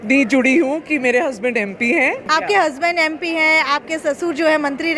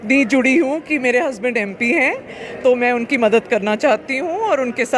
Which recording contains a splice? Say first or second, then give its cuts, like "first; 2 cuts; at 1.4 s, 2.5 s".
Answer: first; 1 cut; at 2.2 s